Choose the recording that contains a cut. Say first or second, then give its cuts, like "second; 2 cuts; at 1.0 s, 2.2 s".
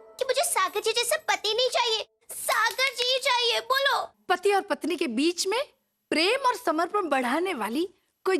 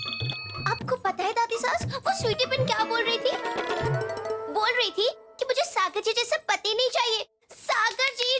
first; 1 cut; at 4.1 s